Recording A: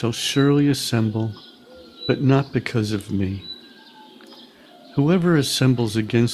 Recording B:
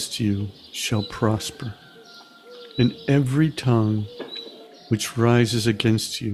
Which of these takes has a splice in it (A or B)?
A